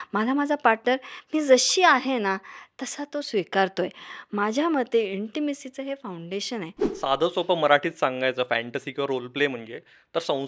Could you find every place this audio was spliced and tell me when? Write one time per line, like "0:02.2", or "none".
0:06.8